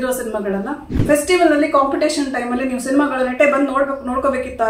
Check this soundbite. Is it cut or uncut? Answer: cut